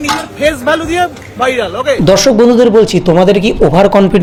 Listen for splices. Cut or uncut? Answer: uncut